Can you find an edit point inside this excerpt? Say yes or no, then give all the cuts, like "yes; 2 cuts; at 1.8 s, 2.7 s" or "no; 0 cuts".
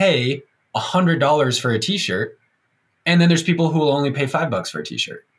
no; 0 cuts